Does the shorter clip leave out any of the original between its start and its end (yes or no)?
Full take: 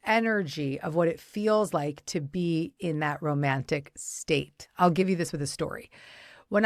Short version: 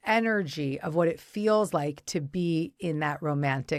no